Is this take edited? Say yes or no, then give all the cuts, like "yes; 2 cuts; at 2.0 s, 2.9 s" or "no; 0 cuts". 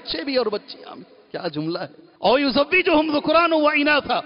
yes; 1 cut; at 2.0 s